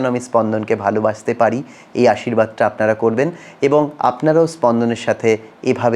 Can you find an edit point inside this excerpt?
no; 0 cuts

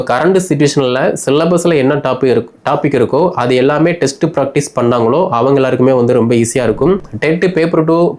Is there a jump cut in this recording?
yes; 1 cut; at 7.1 s

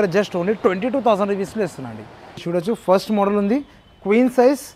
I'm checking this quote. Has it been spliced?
yes; 1 cut; at 2.4 s

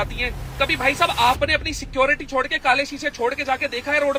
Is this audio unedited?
yes; 0 cuts

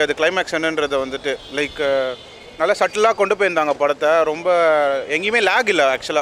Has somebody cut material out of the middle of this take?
no; 0 cuts

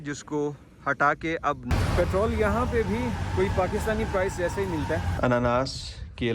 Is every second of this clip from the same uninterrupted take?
no; 2 cuts; at 1.6 s, 5.1 s

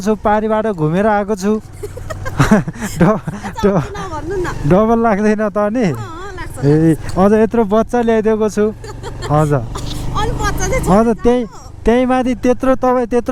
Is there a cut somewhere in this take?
no; 0 cuts

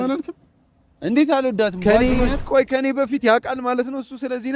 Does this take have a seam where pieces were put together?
yes; 1 cut; at 1.8 s

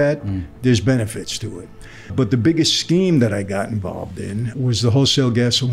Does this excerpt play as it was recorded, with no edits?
no; 2 cuts; at 2.1 s, 4.5 s

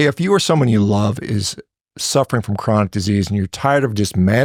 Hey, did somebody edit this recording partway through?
no; 0 cuts

